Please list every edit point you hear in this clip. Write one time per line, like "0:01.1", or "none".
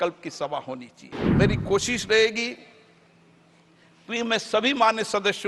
0:01.2